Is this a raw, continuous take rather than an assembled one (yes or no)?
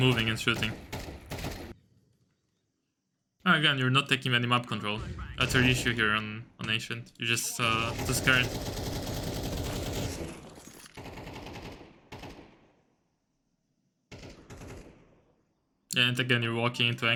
yes